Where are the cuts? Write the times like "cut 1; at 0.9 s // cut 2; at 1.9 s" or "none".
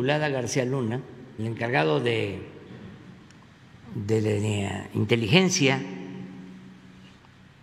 cut 1; at 1.2 s

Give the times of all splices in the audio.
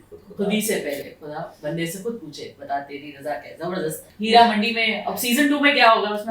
cut 1; at 4.1 s

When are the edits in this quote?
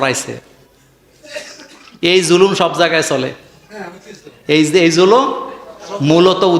none

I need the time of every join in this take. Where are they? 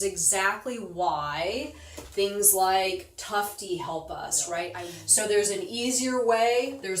cut 1; at 4.9 s

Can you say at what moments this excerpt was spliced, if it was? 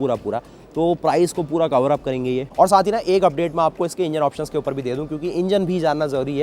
cut 1; at 2.5 s

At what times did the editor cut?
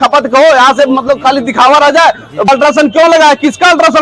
cut 1; at 2.5 s

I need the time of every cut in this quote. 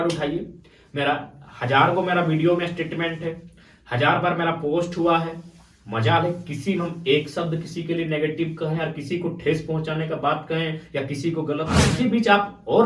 cut 1; at 11.8 s

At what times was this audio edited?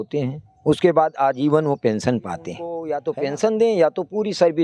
cut 1; at 2.9 s

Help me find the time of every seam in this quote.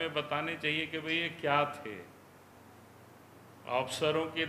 cut 1; at 2.5 s

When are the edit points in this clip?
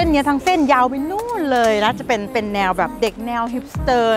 cut 1; at 2.3 s

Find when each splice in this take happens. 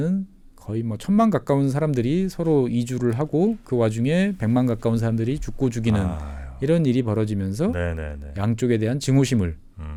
none

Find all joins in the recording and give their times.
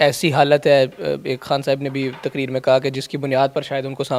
none

